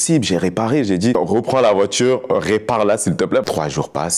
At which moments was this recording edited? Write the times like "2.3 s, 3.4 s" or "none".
1.1 s, 3.5 s